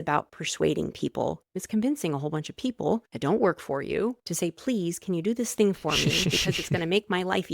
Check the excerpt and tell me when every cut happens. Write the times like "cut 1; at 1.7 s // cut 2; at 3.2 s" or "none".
cut 1; at 1.5 s // cut 2; at 3.1 s // cut 3; at 4.2 s

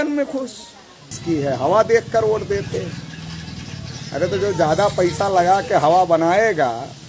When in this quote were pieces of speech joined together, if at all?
cut 1; at 1.1 s

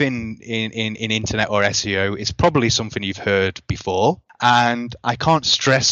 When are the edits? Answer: cut 1; at 4.3 s

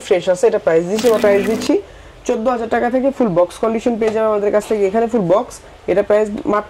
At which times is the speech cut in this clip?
cut 1; at 1.2 s

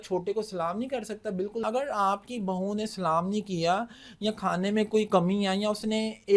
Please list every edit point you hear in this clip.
cut 1; at 1.6 s

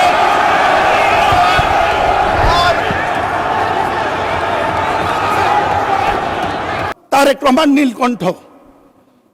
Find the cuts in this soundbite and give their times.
cut 1; at 6.9 s

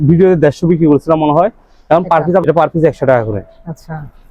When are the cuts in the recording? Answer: cut 1; at 2.4 s

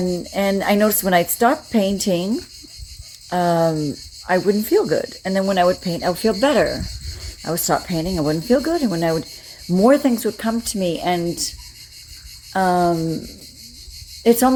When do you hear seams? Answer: none

